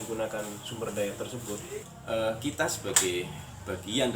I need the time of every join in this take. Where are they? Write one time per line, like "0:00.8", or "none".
0:01.8